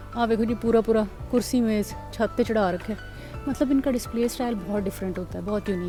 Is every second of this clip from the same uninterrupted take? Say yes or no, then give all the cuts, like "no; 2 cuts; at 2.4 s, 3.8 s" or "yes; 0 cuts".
yes; 0 cuts